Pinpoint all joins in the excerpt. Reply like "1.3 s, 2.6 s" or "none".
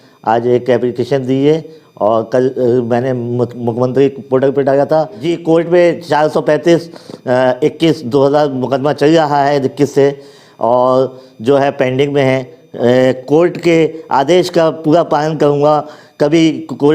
5.2 s, 12.6 s